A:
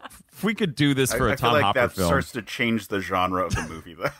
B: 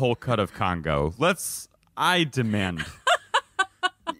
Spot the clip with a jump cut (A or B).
B